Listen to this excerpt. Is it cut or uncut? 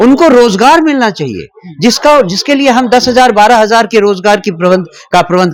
uncut